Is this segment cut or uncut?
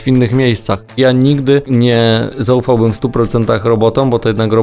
cut